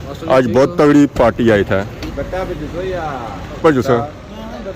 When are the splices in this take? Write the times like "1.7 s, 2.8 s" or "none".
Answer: 2.1 s, 3.6 s